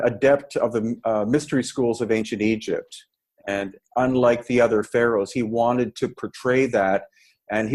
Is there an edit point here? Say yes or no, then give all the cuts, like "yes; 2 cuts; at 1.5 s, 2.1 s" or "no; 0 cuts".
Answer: no; 0 cuts